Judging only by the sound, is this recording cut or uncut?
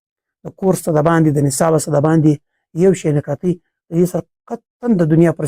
uncut